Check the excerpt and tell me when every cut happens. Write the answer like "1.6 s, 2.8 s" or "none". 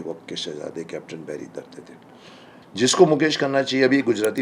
none